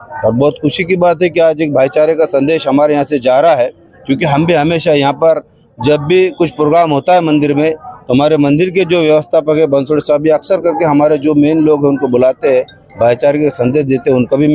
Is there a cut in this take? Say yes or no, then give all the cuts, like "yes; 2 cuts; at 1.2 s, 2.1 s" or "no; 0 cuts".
no; 0 cuts